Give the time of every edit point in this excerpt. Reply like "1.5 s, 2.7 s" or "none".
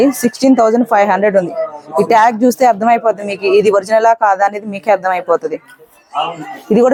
none